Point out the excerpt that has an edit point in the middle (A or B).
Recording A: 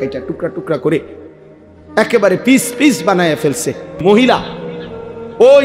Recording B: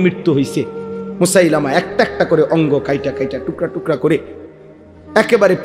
A